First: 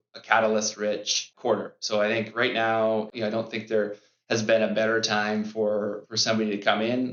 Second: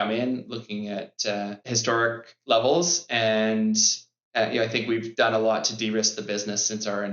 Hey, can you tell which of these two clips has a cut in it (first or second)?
second